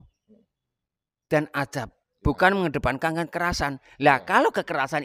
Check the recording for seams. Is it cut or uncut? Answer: uncut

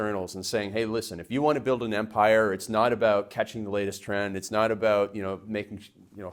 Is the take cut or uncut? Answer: uncut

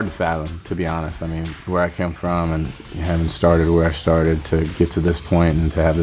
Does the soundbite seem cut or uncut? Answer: cut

